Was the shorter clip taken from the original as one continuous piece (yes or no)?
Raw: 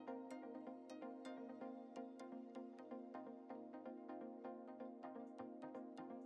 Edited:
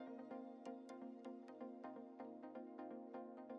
yes